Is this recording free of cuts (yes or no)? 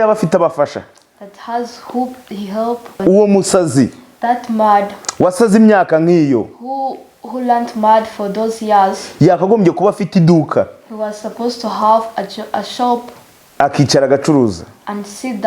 no